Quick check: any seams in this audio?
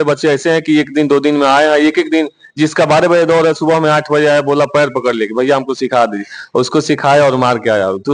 no; 0 cuts

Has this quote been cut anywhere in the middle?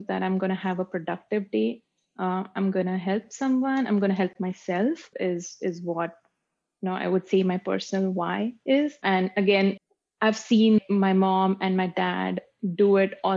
yes; 2 cuts; at 5.1 s, 9.7 s

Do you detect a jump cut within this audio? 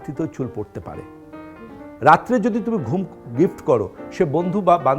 yes; 1 cut; at 1.4 s

